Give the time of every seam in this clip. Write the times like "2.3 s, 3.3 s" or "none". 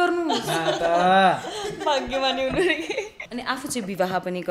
3.1 s